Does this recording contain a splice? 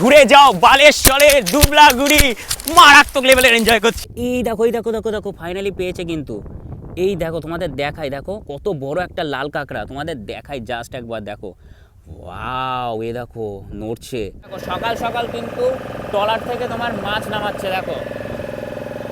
yes; 2 cuts; at 4.1 s, 14.6 s

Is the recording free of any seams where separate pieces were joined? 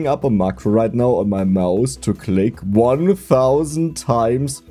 yes; 0 cuts

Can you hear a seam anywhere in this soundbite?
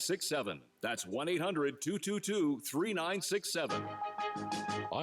yes; 1 cut; at 3.8 s

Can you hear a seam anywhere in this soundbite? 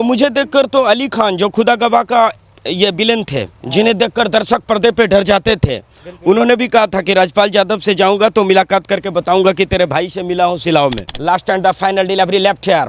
yes; 1 cut; at 11.1 s

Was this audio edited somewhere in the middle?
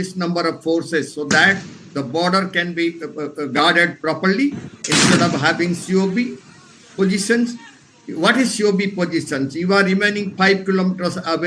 no; 0 cuts

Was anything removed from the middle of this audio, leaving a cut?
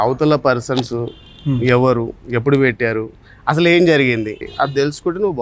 yes; 1 cut; at 4.4 s

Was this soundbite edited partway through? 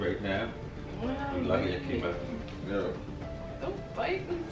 yes; 1 cut; at 3.5 s

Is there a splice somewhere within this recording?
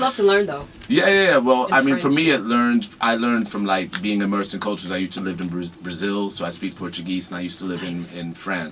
no; 0 cuts

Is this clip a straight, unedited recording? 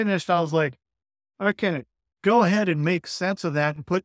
yes; 0 cuts

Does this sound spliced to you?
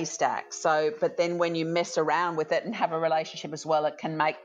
no; 0 cuts

